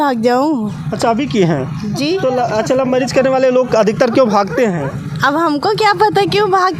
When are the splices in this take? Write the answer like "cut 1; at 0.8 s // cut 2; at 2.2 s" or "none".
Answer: none